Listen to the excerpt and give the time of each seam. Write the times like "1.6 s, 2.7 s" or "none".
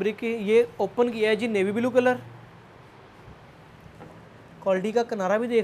none